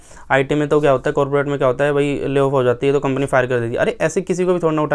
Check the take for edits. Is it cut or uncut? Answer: uncut